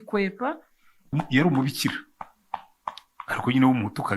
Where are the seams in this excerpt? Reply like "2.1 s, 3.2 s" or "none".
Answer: 1.1 s